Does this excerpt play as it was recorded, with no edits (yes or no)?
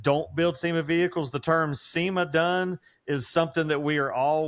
yes